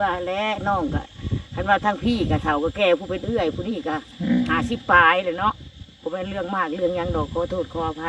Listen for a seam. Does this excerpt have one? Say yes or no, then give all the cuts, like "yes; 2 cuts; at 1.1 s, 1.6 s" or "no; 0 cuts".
no; 0 cuts